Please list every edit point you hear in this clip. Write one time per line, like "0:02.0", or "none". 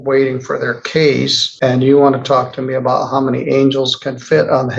0:01.4